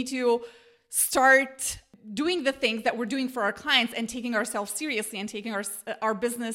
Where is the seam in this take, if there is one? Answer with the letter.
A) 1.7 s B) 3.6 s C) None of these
C